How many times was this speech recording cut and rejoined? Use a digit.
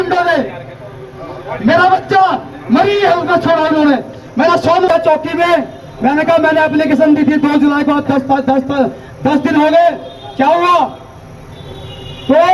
1